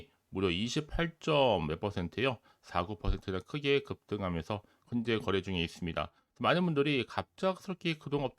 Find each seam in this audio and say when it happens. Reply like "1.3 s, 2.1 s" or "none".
4.7 s